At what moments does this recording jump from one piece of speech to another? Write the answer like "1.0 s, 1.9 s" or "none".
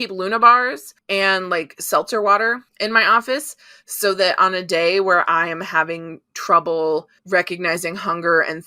0.9 s, 2.7 s, 7.1 s